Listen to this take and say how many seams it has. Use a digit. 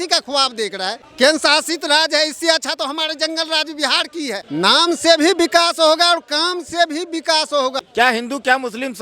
3